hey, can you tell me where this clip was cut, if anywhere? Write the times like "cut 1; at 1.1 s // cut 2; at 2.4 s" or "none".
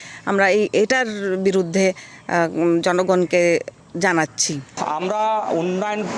cut 1; at 4.7 s

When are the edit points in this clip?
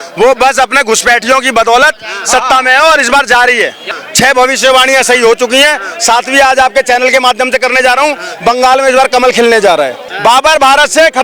cut 1; at 4.0 s // cut 2; at 10.0 s

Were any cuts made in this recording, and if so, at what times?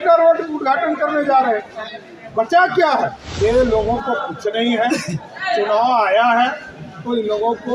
cut 1; at 3.2 s

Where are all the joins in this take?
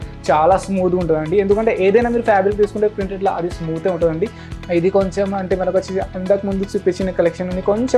cut 1; at 4.4 s

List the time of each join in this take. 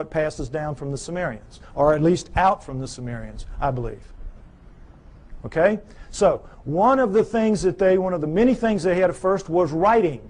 none

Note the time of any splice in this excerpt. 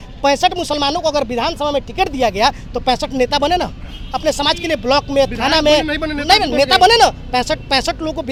none

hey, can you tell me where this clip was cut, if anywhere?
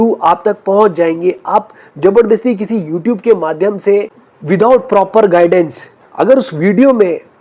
none

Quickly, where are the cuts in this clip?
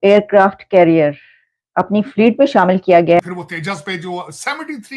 cut 1; at 3.2 s

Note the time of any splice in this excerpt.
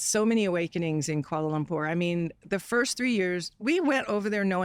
none

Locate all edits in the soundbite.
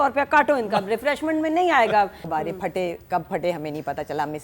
cut 1; at 2.2 s

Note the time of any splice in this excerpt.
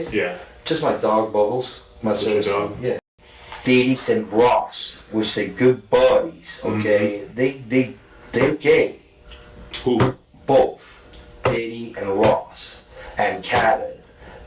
cut 1; at 3.0 s

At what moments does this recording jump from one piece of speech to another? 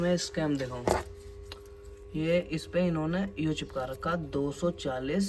none

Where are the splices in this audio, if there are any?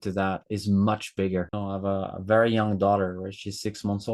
cut 1; at 1.6 s

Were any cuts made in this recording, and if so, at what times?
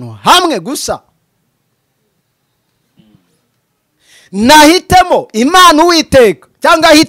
none

